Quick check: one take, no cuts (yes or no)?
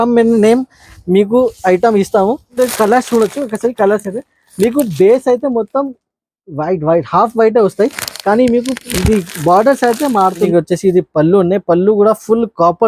no